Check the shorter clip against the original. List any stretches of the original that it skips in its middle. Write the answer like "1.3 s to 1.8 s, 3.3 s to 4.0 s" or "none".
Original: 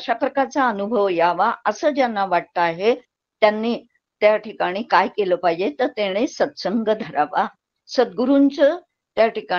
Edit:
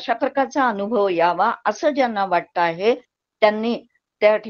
none